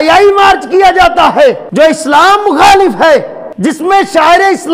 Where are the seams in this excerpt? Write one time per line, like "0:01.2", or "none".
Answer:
0:01.6
0:03.4